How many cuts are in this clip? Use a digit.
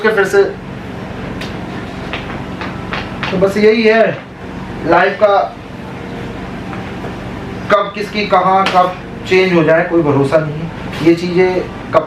0